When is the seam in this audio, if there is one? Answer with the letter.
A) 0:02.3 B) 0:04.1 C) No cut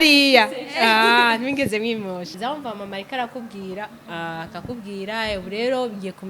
A